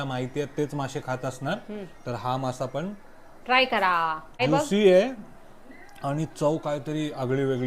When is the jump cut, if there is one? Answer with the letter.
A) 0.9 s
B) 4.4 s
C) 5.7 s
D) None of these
B